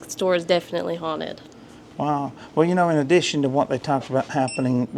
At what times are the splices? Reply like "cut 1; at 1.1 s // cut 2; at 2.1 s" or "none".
none